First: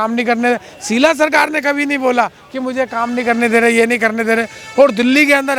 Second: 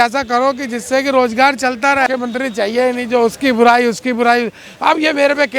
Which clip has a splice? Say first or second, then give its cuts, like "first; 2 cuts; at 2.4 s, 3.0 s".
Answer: second; 1 cut; at 2.1 s